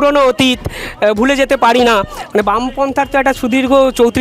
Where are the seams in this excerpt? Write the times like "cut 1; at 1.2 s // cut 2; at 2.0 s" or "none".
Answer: none